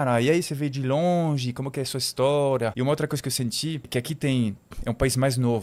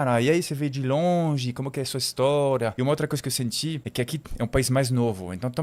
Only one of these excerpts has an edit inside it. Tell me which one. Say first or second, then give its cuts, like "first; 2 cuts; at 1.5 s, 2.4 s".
second; 1 cut; at 4.1 s